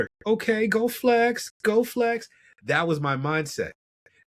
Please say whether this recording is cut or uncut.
uncut